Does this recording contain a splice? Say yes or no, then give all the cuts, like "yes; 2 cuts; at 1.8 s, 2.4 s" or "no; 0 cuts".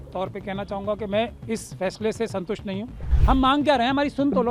yes; 1 cut; at 3.1 s